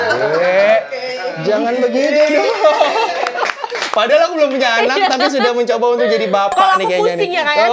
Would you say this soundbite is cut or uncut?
uncut